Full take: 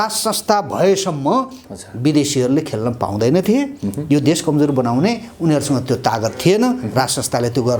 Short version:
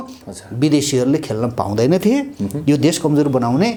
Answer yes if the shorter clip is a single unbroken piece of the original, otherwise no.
yes